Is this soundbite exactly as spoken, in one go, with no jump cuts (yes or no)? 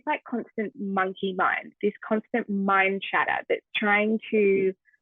yes